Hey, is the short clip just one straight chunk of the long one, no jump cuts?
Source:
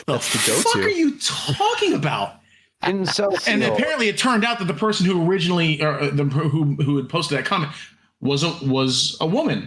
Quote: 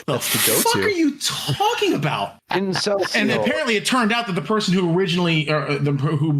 no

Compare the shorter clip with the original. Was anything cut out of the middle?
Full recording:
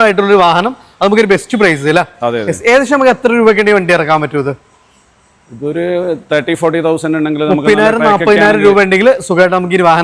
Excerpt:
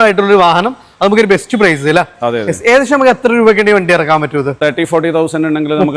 yes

